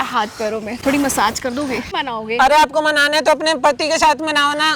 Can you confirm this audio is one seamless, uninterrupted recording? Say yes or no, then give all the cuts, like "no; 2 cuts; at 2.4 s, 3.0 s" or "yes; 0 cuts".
no; 1 cut; at 1.9 s